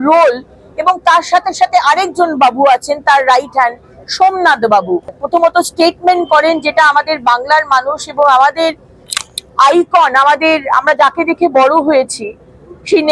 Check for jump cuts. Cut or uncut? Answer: cut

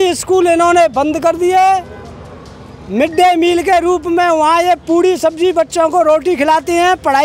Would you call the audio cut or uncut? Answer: uncut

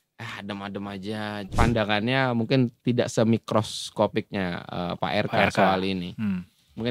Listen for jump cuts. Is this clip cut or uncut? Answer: cut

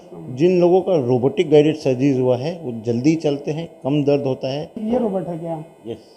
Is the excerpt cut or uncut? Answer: cut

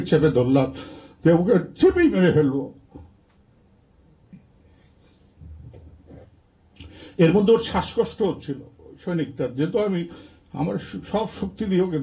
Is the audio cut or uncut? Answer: uncut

